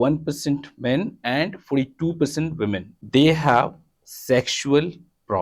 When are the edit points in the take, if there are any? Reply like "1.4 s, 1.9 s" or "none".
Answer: 2.9 s